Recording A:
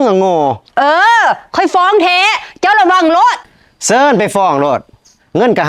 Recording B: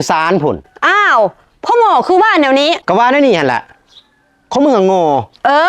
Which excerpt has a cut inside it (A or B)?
B